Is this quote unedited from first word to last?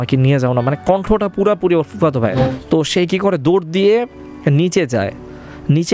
no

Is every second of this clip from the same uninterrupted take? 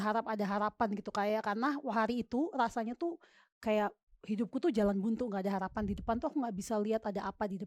yes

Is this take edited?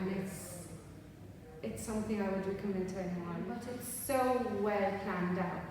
yes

